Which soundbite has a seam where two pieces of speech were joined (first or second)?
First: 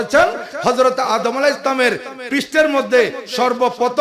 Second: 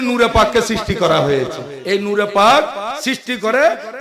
second